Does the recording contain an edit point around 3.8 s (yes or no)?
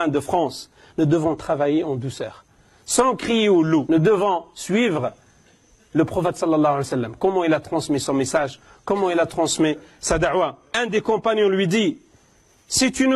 yes